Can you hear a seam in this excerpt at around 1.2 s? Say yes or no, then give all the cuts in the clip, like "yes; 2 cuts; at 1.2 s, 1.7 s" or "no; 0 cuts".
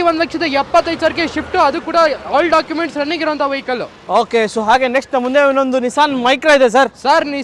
no; 0 cuts